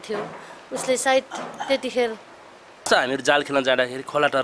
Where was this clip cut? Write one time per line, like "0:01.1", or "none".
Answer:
0:02.9